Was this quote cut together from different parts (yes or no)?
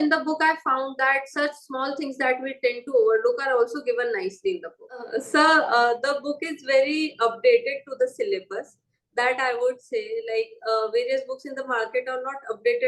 yes